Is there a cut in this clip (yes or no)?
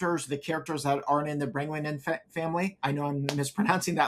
yes